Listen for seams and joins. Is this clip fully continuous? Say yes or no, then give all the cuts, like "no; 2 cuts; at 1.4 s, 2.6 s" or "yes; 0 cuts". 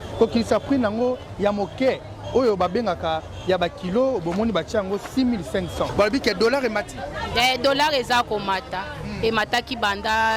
no; 1 cut; at 5.9 s